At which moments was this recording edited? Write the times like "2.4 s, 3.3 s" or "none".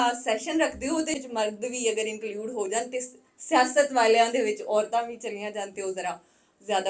1.2 s